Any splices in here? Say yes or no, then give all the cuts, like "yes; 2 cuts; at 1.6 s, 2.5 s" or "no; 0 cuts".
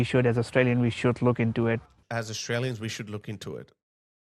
no; 0 cuts